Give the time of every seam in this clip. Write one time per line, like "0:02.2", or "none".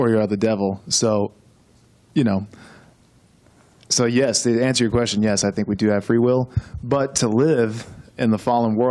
0:03.4